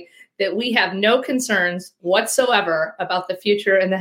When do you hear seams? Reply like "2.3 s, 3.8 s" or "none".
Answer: none